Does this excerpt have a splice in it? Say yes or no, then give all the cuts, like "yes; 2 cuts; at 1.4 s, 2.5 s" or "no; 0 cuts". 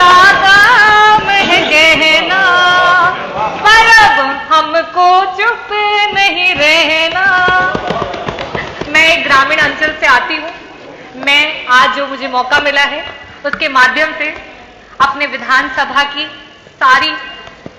no; 0 cuts